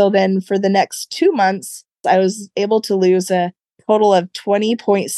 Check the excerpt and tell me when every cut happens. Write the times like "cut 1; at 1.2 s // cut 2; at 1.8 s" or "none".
cut 1; at 2.0 s